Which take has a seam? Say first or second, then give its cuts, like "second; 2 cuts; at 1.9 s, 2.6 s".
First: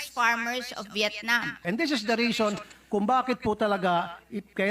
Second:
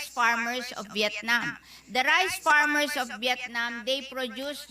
first; 1 cut; at 1.6 s